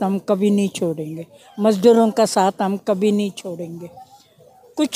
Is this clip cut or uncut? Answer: uncut